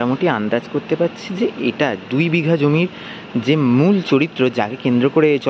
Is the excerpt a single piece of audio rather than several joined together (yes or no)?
yes